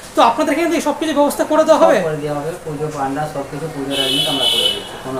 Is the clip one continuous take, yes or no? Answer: yes